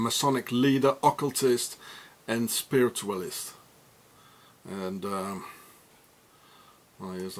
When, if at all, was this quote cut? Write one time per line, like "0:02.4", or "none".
none